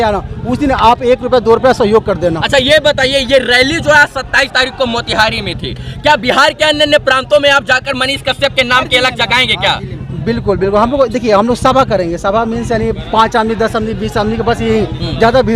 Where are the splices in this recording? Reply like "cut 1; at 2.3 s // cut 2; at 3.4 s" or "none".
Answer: none